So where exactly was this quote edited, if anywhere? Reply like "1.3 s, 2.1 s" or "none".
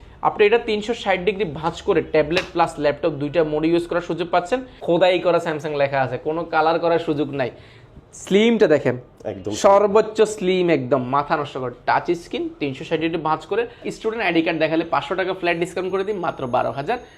4.7 s, 13.9 s